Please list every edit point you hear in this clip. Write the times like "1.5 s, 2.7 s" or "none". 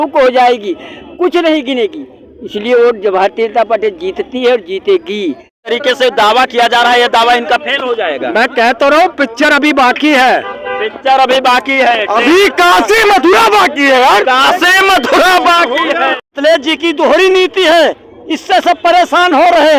5.7 s, 16.3 s